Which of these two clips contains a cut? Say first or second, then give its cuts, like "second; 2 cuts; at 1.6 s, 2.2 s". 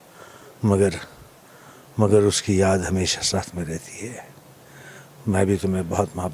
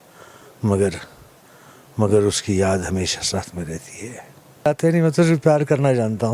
second; 1 cut; at 4.7 s